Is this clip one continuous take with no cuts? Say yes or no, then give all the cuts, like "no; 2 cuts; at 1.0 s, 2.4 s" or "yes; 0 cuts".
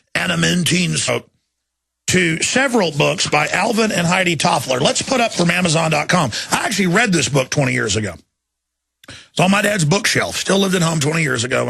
yes; 0 cuts